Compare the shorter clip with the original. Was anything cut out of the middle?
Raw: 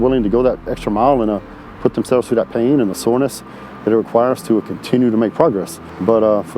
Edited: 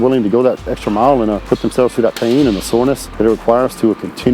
yes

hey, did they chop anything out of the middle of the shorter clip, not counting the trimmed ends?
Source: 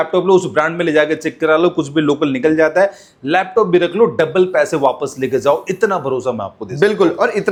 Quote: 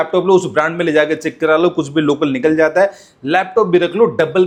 no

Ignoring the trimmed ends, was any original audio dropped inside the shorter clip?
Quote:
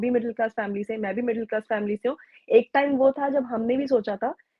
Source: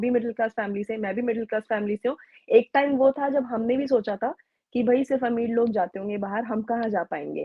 no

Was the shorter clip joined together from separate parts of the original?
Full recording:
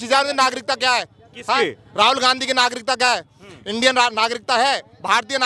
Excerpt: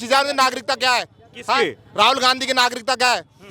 no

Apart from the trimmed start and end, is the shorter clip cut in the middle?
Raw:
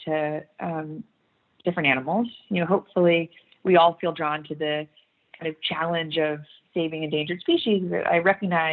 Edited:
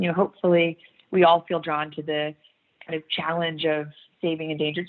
no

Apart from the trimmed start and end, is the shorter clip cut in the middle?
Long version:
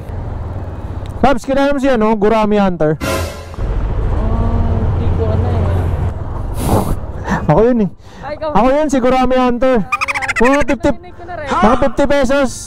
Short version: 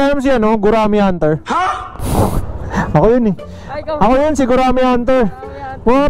yes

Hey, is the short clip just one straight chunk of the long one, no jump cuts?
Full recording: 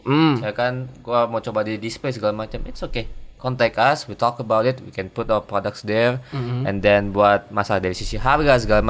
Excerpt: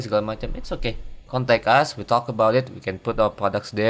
yes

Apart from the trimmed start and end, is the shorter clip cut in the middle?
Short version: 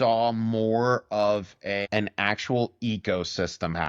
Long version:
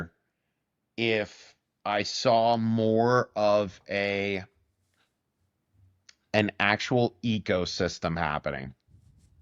yes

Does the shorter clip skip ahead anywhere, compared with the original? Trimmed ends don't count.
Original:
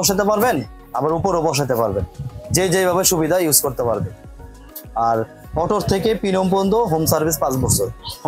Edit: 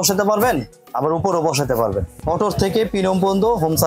yes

